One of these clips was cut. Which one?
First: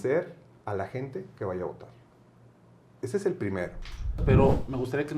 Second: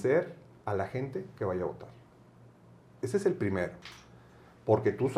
first; 1 cut; at 4.2 s

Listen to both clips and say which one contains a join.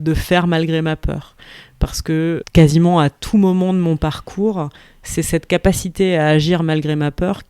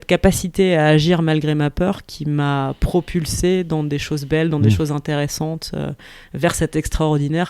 first; 1 cut; at 2.5 s

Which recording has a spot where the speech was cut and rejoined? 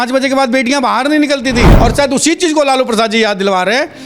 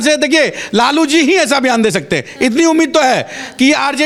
first; 1 cut; at 1.7 s

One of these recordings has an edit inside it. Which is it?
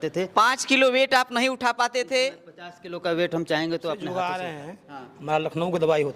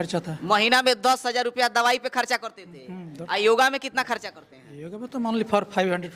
first; 1 cut; at 3.9 s

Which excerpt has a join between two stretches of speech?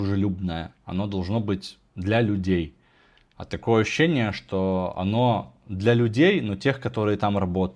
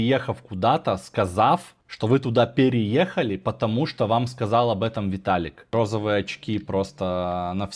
second; 1 cut; at 5.7 s

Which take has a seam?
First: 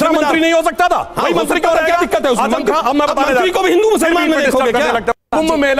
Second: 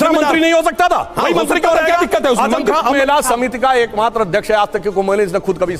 second; 1 cut; at 3.0 s

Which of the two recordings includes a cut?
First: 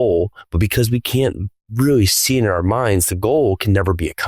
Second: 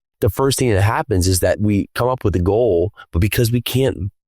second; 1 cut; at 1.6 s

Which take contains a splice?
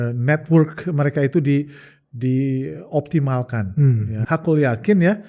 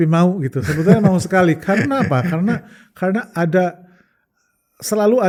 first; 1 cut; at 4.2 s

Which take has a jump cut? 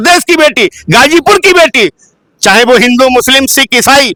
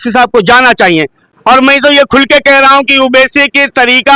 second; 1 cut; at 1.2 s

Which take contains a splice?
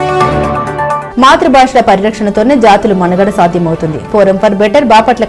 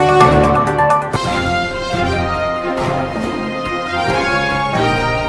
first; 1 cut; at 0.9 s

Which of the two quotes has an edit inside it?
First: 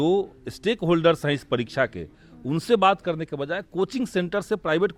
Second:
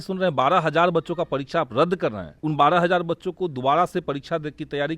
second; 1 cut; at 2.3 s

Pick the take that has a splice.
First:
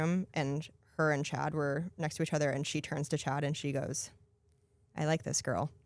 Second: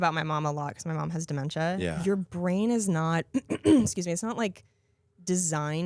second; 1 cut; at 1.9 s

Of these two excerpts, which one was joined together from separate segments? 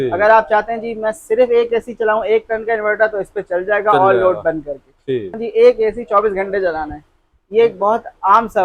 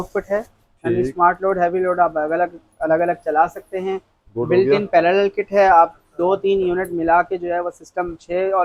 first; 1 cut; at 5.4 s

